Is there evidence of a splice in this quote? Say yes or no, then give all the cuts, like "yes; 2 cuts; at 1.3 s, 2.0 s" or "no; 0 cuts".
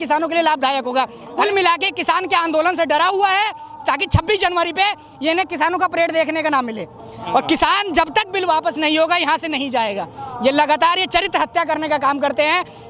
yes; 1 cut; at 1.4 s